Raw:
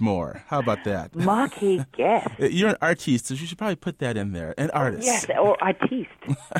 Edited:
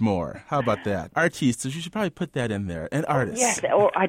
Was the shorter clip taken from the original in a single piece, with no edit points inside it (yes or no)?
no